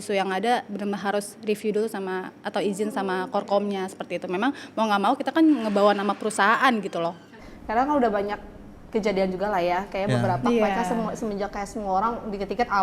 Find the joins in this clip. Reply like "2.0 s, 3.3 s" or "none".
7.2 s